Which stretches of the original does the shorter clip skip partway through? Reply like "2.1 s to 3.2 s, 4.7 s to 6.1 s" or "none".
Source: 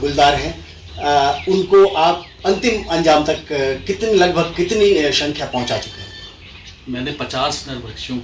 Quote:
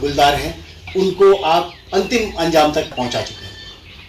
0.9 s to 1.4 s, 3.4 s to 5.5 s